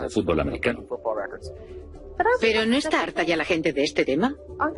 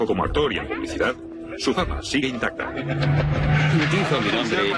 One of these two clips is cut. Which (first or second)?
first